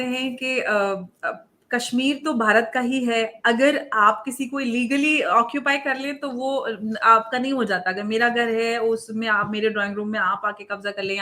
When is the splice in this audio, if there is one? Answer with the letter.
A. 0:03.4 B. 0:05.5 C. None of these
C